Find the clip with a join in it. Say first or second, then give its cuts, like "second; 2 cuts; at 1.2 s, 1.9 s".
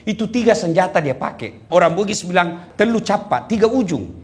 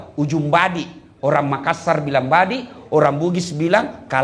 first; 2 cuts; at 1.6 s, 2.6 s